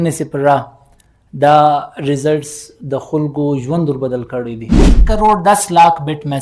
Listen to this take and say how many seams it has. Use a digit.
1